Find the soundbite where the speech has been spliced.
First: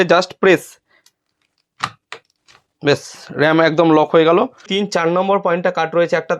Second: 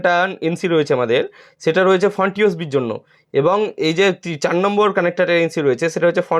first; 1 cut; at 4.7 s

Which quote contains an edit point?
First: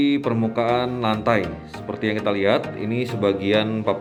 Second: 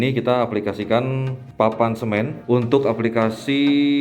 second; 2 cuts; at 1.4 s, 2.4 s

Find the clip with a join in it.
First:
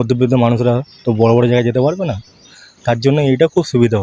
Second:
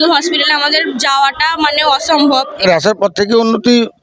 second; 1 cut; at 2.7 s

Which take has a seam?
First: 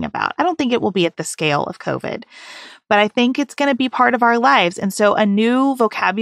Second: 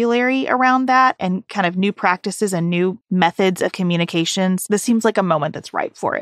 second; 1 cut; at 3.0 s

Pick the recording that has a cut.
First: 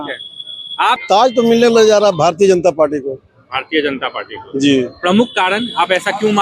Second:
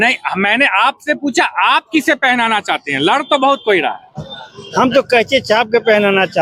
first; 1 cut; at 1.0 s

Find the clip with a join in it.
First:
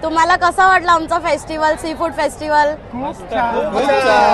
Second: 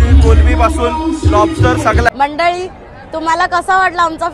second; 1 cut; at 2.1 s

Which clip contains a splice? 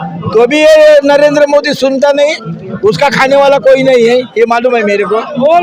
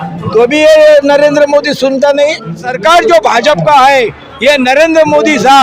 second; 1 cut; at 2.7 s

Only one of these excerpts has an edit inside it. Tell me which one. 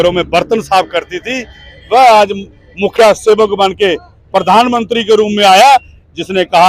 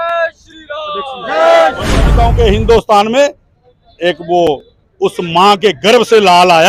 second; 1 cut; at 2.0 s

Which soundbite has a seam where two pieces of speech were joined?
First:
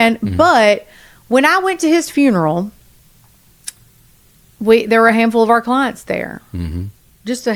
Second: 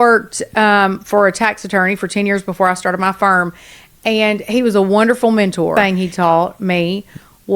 second; 1 cut; at 5.7 s

